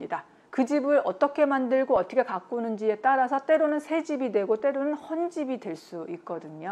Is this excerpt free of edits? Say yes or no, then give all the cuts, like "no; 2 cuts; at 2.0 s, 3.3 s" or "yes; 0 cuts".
yes; 0 cuts